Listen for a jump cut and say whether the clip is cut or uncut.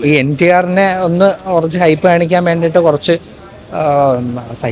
uncut